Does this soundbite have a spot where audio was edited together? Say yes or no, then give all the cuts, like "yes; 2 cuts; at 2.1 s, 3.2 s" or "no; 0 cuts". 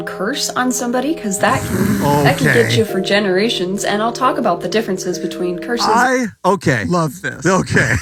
no; 0 cuts